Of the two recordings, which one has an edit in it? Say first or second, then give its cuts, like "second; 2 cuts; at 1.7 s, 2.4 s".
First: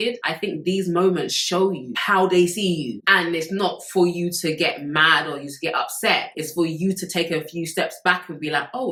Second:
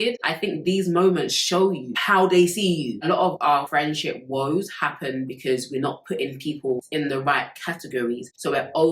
second; 2 cuts; at 3.0 s, 6.8 s